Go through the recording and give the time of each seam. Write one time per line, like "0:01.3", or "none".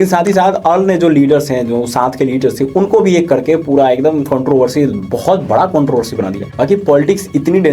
0:06.4